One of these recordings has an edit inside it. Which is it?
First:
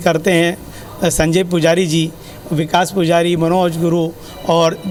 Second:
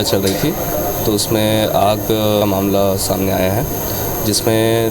second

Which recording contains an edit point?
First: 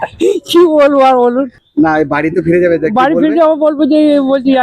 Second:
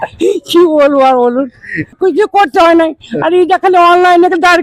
first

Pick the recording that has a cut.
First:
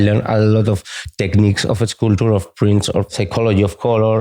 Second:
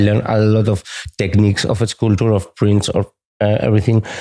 first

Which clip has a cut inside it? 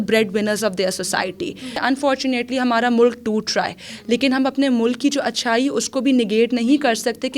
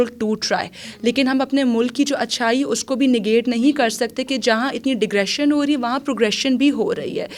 first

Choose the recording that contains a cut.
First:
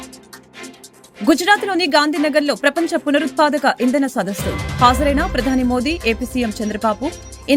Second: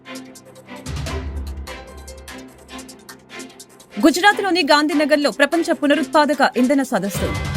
second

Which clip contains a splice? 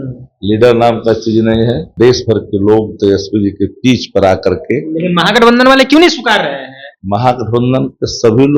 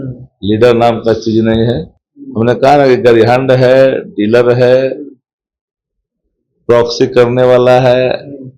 first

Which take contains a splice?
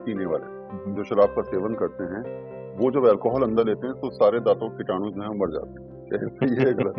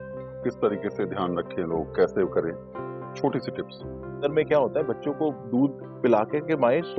second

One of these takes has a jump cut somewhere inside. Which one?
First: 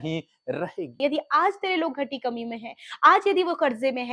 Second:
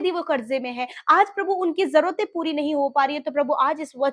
first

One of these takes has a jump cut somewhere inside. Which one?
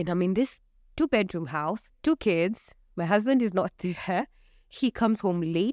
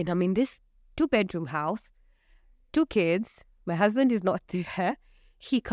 first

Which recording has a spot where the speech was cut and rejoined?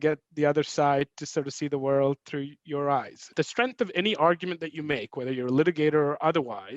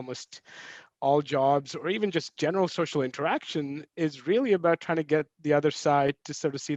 first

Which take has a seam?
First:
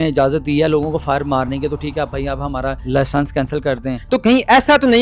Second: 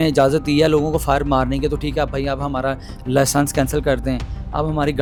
first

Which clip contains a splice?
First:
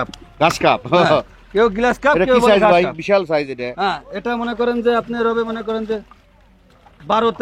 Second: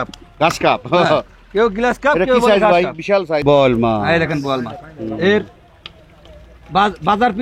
second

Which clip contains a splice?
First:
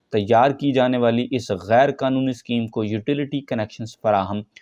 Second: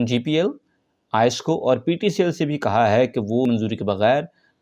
second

